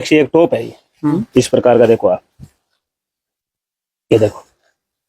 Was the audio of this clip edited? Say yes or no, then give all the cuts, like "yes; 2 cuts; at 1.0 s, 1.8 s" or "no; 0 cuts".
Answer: yes; 1 cut; at 1.2 s